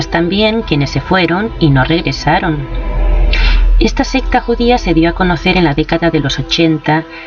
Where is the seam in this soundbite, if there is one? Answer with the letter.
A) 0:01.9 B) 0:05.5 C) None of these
B